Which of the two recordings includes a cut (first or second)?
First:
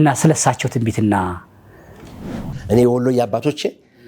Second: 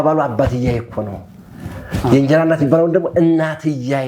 first